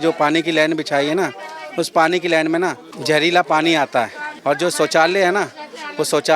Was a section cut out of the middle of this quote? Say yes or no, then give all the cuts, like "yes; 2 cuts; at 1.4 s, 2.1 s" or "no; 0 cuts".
yes; 2 cuts; at 2.9 s, 4.3 s